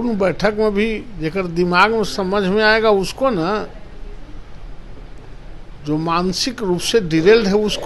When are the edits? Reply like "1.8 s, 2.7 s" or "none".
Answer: none